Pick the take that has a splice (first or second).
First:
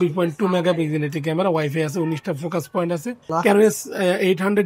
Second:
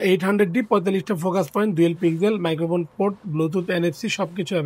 first